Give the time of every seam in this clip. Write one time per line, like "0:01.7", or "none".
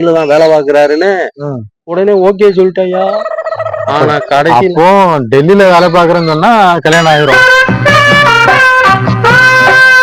none